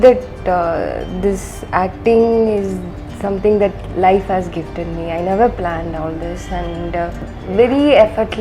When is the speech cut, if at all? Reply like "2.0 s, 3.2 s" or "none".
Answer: 7.3 s